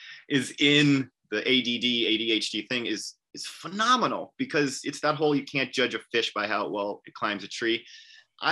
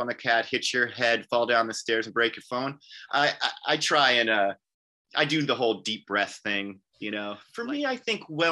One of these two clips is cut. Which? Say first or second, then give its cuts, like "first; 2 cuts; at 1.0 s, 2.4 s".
second; 1 cut; at 7.4 s